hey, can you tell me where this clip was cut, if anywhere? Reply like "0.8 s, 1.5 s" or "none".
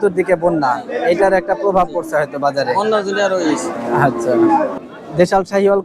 4.8 s